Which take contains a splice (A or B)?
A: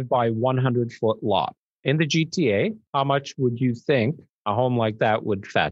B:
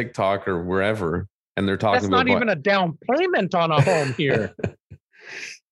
A